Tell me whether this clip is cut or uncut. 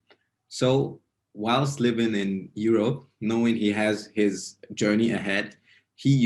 uncut